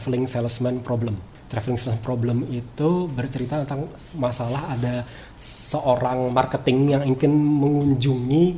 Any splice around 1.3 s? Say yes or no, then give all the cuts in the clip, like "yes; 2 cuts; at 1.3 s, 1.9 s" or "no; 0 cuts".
yes; 1 cut; at 1.3 s